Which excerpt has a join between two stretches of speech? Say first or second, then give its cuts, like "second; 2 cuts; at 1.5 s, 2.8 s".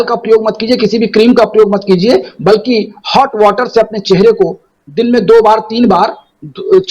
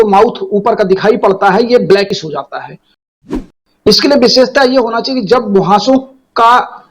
second; 1 cut; at 3.1 s